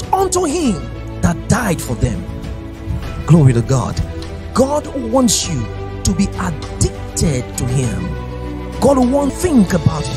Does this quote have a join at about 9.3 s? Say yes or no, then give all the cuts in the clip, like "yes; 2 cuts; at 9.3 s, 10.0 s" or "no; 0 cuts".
yes; 1 cut; at 9.3 s